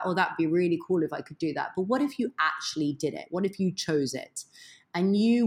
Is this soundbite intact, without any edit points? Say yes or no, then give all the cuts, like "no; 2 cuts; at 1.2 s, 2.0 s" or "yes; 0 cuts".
yes; 0 cuts